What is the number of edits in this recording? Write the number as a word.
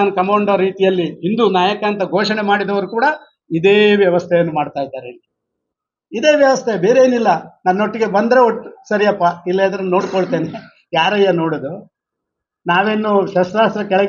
zero